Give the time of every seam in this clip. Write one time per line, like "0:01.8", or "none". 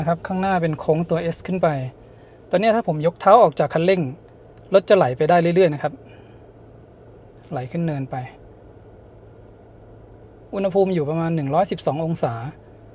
none